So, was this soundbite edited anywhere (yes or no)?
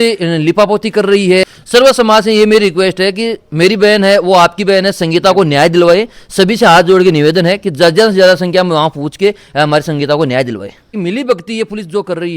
yes